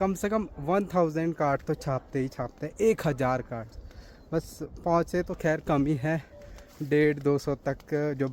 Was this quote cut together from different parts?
no; 0 cuts

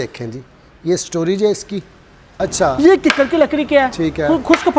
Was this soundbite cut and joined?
yes; 1 cut; at 2.3 s

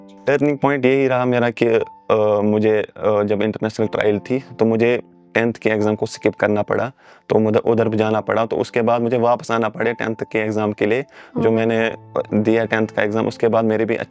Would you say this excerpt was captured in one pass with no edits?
yes; 0 cuts

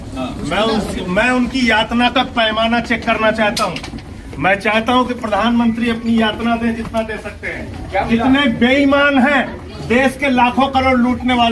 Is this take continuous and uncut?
yes; 0 cuts

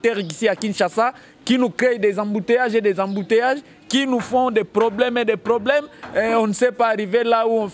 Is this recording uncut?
yes; 0 cuts

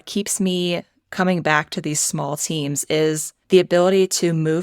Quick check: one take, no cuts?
no; 1 cut; at 3.3 s

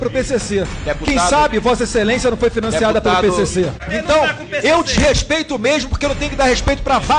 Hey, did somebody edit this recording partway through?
yes; 1 cut; at 3.8 s

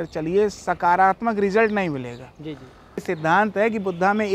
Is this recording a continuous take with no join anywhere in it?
no; 1 cut; at 3.0 s

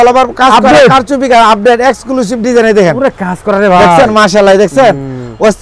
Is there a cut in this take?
no; 0 cuts

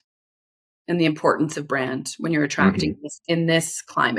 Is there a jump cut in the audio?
no; 0 cuts

